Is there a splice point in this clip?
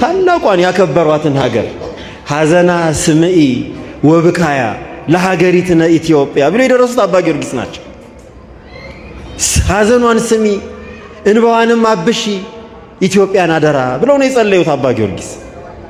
no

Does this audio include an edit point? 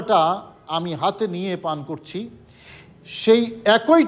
no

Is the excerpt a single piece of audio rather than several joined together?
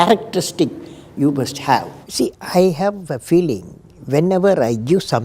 no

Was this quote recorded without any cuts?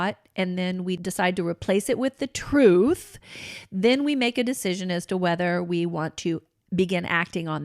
no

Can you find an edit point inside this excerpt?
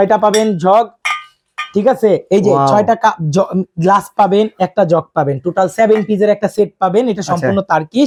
no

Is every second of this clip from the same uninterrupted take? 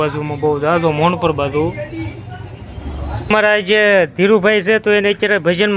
no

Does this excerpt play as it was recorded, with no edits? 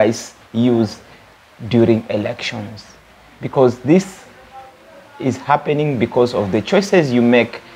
yes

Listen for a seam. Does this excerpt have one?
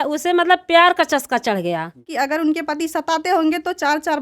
yes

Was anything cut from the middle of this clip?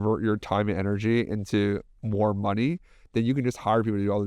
no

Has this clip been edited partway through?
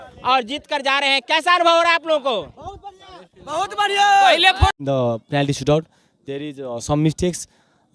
yes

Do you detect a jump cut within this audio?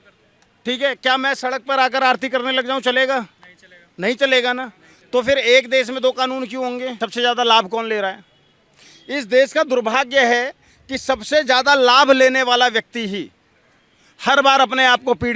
yes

